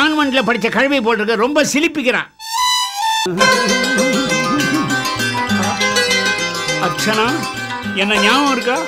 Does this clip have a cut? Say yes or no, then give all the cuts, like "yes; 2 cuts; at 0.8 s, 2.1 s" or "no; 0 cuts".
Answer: yes; 1 cut; at 3.2 s